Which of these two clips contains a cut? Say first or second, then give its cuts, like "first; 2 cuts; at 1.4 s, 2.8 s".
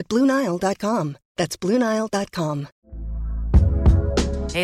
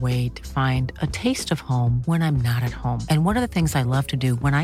first; 1 cut; at 2.7 s